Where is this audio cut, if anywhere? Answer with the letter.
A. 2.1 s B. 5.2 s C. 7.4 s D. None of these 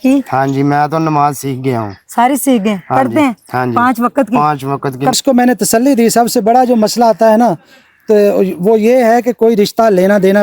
B